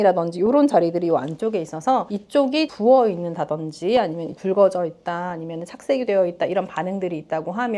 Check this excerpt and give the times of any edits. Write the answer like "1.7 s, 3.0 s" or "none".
none